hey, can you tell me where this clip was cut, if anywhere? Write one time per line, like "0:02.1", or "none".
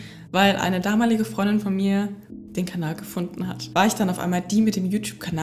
0:03.7